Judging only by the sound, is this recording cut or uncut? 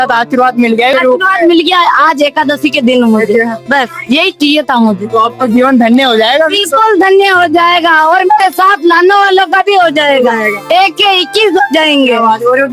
cut